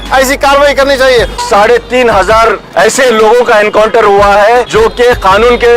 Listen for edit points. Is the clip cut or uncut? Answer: cut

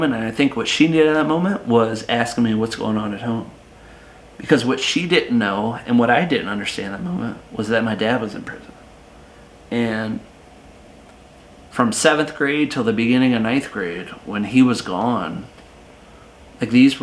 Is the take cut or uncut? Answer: uncut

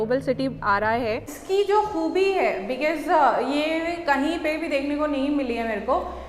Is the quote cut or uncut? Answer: cut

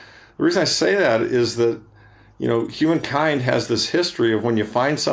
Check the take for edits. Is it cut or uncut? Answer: uncut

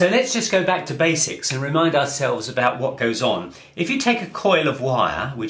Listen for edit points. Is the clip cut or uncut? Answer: cut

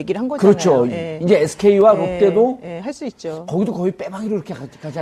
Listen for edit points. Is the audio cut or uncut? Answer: uncut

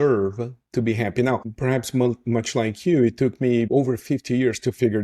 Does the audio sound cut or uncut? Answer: cut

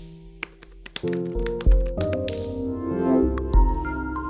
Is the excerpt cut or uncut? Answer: uncut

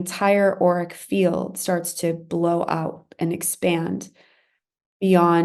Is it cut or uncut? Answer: uncut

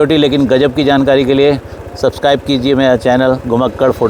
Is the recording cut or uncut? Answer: uncut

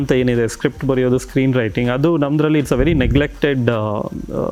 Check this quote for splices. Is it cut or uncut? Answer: uncut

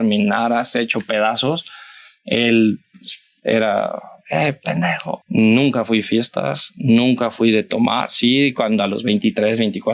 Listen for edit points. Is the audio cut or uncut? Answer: cut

